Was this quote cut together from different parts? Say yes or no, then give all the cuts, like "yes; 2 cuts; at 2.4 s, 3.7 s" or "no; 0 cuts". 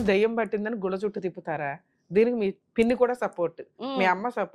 yes; 1 cut; at 2.6 s